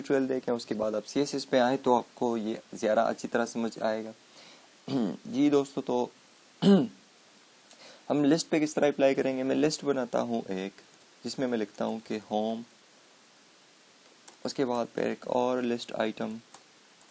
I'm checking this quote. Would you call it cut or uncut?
cut